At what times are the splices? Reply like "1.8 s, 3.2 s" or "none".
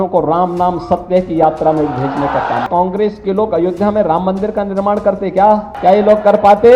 2.7 s, 5.7 s